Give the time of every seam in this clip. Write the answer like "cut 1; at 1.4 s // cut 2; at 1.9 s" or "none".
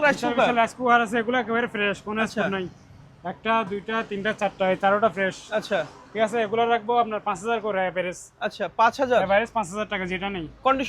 none